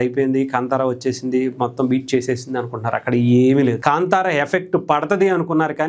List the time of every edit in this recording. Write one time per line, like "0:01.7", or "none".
0:03.8